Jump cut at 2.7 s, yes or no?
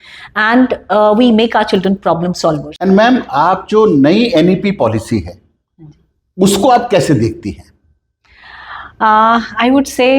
yes